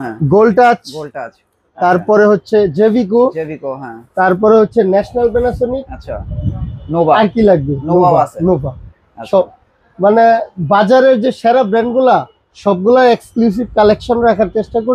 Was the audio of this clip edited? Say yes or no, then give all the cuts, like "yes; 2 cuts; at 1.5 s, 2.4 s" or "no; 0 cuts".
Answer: no; 0 cuts